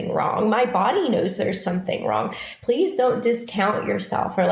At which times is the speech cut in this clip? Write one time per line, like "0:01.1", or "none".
none